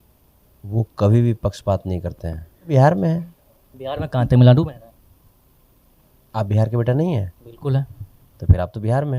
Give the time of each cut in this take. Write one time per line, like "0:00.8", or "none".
0:02.7